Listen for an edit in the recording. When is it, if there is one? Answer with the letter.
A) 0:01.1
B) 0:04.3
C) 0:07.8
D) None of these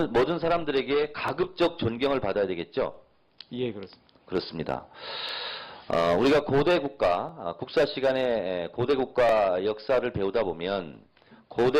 B